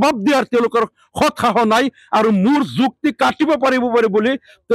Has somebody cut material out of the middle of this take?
no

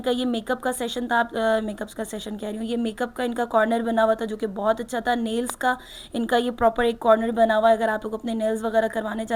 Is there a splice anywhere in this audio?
no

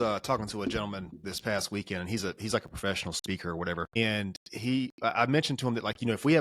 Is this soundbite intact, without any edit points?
no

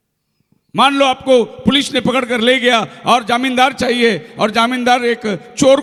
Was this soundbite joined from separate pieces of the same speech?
no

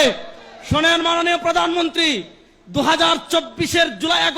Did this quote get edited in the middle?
no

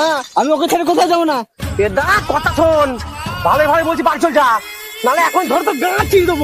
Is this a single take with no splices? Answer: yes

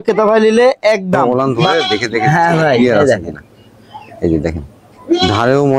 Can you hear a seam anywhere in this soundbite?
yes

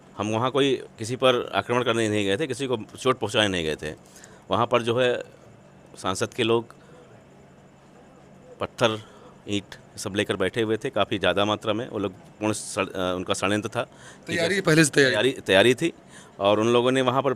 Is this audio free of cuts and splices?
yes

